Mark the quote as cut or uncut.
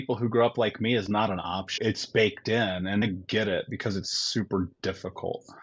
cut